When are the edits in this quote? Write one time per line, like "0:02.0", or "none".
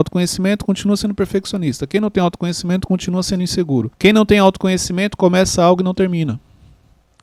0:03.9

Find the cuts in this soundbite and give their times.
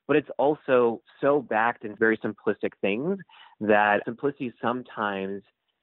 0:01.9
0:04.0

